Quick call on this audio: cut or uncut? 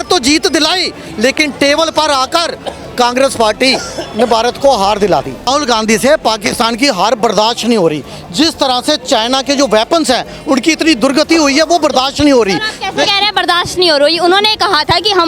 cut